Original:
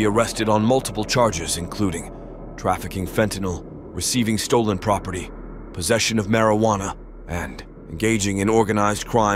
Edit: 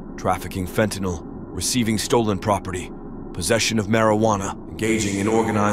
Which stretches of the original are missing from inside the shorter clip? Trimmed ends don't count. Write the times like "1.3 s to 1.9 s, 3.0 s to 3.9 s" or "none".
7.0 s to 7.8 s